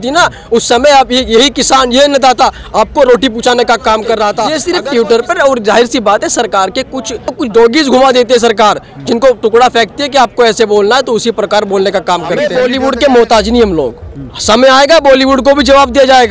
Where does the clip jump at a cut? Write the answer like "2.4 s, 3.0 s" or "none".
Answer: 4.5 s, 7.3 s, 12.4 s